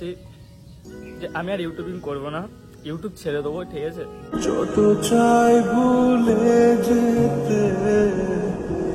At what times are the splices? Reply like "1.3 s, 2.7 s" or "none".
none